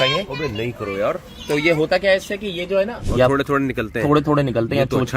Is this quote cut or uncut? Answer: cut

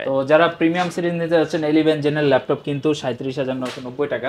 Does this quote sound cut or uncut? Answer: uncut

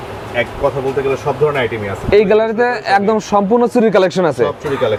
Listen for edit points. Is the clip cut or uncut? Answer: uncut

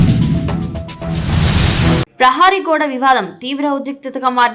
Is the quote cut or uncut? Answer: uncut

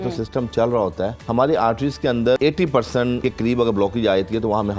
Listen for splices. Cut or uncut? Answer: cut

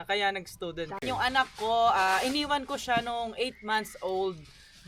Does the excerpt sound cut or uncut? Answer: cut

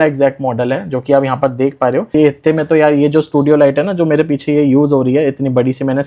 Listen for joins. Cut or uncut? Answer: cut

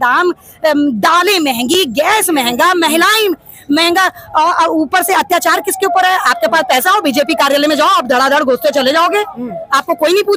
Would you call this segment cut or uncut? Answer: uncut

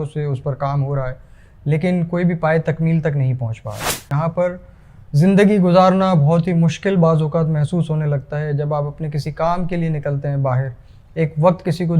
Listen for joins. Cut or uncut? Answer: cut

